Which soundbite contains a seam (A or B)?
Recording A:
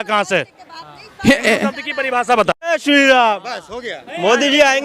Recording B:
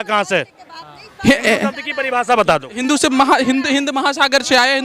A